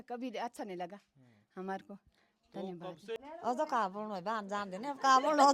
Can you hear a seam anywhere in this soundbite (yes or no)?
yes